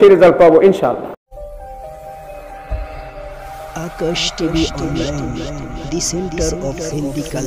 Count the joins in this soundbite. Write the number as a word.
one